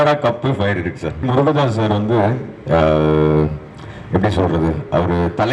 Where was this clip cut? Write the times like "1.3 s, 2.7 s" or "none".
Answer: 1.2 s